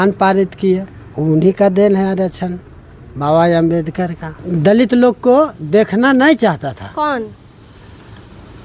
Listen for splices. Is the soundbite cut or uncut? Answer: cut